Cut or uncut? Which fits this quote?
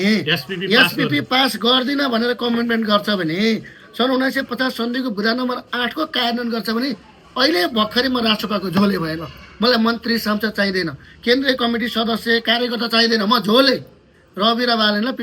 uncut